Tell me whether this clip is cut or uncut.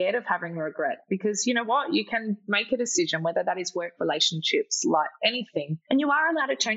cut